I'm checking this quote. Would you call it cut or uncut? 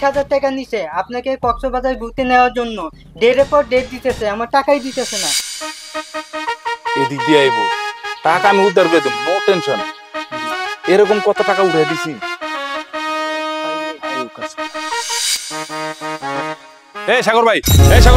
cut